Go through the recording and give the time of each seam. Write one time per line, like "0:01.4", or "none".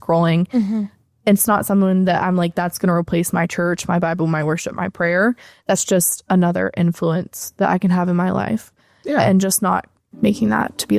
none